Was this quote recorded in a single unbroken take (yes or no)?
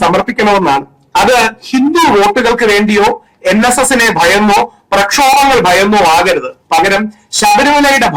yes